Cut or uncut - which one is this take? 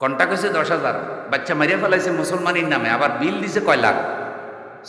uncut